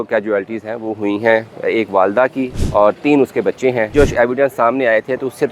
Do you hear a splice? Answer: yes; 2 cuts; at 2.6 s, 3.9 s

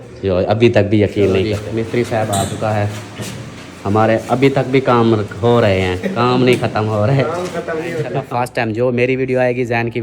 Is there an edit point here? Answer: yes; 2 cuts; at 1.5 s, 8.1 s

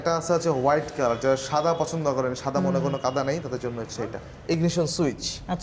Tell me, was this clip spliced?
yes; 1 cut; at 4.3 s

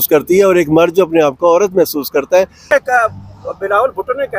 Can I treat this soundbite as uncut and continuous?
no; 1 cut; at 2.7 s

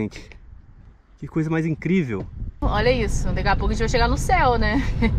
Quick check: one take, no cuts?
no; 1 cut; at 2.6 s

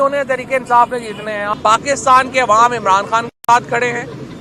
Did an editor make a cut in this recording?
yes; 1 cut; at 1.5 s

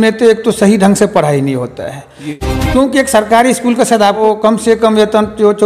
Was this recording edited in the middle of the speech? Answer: yes; 2 cuts; at 2.4 s, 4.2 s

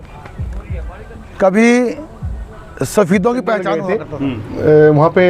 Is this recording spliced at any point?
yes; 1 cut; at 4.0 s

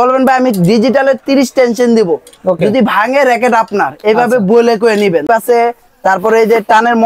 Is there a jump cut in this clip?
yes; 1 cut; at 5.3 s

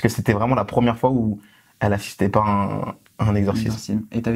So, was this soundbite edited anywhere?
no; 0 cuts

